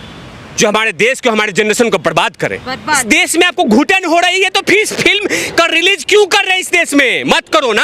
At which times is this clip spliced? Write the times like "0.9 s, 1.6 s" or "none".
3.0 s